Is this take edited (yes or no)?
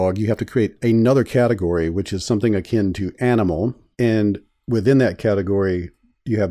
no